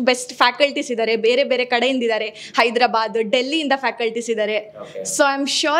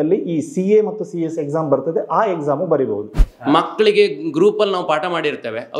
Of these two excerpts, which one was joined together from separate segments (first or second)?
second